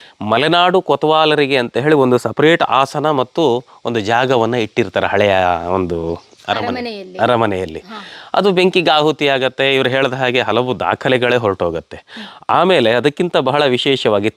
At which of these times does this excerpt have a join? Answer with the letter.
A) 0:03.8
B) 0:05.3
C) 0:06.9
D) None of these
D